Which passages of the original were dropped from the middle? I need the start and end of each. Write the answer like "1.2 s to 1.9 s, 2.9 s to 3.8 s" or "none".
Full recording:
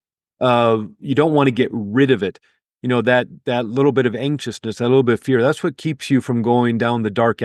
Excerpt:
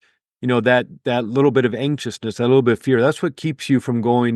none